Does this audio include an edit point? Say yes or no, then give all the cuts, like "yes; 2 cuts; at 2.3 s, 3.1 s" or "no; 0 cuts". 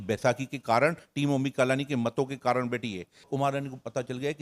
yes; 1 cut; at 3.3 s